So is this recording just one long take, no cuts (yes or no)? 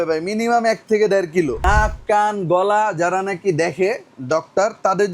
no